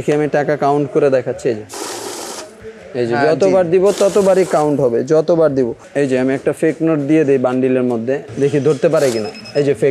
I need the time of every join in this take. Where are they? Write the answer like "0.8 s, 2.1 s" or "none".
5.8 s, 8.3 s